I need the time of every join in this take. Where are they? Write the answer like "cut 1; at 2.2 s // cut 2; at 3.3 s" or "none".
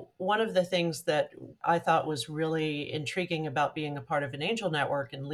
cut 1; at 1.6 s